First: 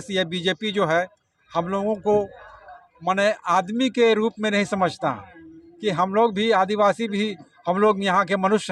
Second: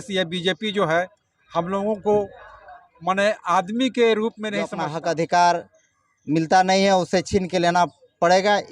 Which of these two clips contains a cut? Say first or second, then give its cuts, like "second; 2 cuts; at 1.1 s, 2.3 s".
second; 1 cut; at 4.7 s